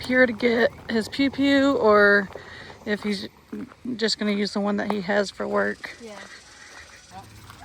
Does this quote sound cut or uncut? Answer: uncut